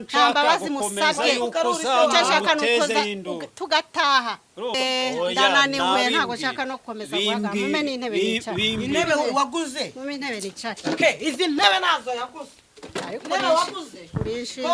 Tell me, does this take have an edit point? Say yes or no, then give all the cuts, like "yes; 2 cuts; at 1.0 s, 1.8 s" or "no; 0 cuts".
yes; 1 cut; at 4.7 s